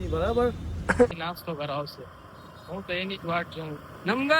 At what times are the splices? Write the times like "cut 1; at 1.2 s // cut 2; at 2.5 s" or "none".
cut 1; at 1.1 s